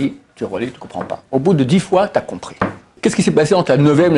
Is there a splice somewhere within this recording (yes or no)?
yes